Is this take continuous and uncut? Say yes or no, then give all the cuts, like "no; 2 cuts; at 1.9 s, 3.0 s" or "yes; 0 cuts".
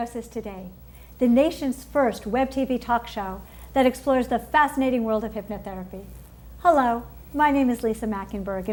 yes; 0 cuts